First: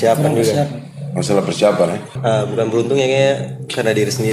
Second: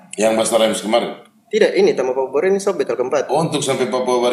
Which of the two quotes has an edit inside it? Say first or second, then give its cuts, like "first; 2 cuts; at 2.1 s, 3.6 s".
first; 1 cut; at 2.2 s